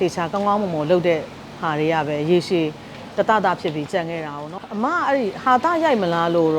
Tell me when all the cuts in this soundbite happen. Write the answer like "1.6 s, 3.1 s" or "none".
4.4 s